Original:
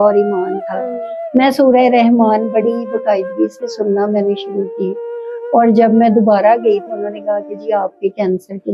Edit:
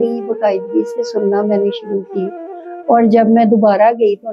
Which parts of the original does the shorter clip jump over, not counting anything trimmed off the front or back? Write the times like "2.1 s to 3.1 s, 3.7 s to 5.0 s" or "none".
none